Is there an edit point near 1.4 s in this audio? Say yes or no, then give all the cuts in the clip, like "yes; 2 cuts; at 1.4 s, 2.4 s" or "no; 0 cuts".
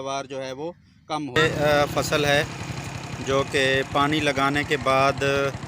yes; 1 cut; at 1.4 s